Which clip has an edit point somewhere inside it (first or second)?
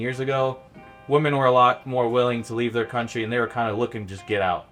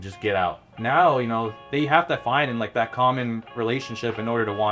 second